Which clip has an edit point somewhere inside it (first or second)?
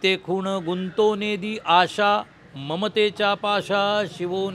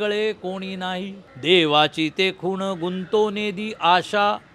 second